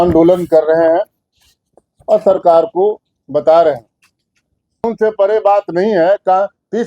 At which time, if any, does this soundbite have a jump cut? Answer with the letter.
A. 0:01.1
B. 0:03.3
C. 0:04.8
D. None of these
C